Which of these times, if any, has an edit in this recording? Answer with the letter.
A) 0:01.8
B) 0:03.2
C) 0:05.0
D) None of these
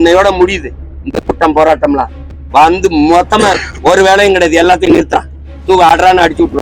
D